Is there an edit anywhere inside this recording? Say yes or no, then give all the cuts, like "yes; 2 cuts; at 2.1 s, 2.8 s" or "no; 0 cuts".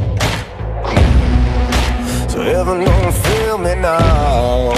no; 0 cuts